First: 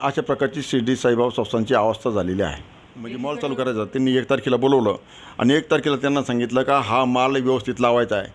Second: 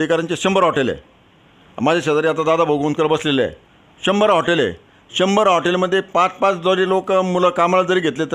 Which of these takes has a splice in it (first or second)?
first